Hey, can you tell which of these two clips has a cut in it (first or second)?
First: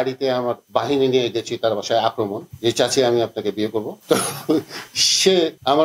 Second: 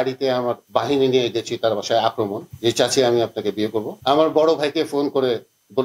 second